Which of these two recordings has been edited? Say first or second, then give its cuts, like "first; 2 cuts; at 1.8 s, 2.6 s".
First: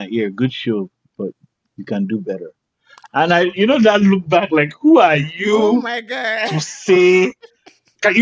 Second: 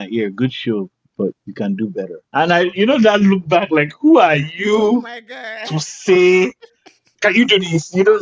second; 2 cuts; at 1.4 s, 2.2 s